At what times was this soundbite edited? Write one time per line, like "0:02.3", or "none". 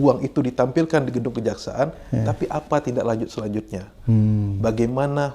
none